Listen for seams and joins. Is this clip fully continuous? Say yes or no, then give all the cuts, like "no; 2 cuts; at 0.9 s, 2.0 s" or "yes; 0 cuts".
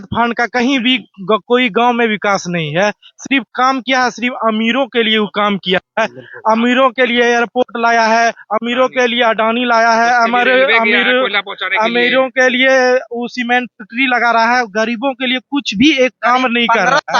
yes; 0 cuts